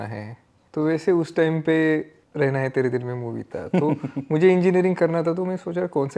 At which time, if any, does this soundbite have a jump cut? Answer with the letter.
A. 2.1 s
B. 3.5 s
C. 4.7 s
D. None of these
D